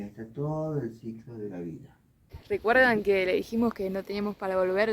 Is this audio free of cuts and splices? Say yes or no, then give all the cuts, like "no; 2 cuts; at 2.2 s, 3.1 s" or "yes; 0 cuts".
no; 1 cut; at 2.6 s